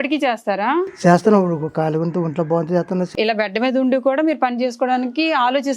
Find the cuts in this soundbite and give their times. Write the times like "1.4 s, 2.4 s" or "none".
3.1 s